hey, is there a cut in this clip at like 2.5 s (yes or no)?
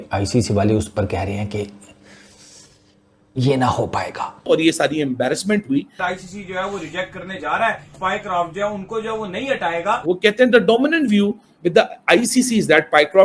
no